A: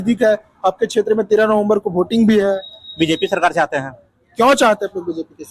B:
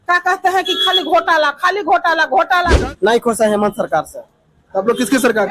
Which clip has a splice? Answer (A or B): B